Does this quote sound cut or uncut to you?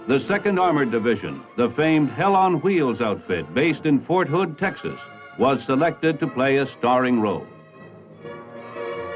cut